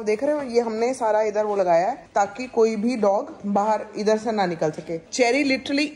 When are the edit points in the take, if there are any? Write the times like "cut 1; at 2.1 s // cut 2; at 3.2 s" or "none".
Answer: none